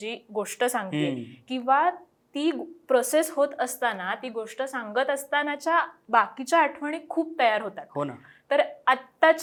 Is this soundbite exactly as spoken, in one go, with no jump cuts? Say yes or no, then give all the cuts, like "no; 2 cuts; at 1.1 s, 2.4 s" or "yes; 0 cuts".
yes; 0 cuts